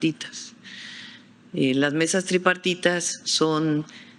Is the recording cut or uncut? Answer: uncut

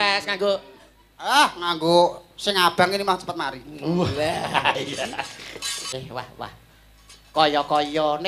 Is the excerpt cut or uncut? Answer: cut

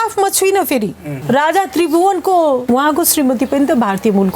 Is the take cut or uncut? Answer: cut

